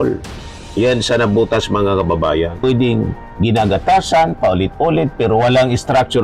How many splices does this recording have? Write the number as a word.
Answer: one